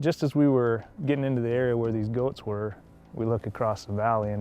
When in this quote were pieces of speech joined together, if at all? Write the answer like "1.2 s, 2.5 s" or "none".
0.9 s, 3.0 s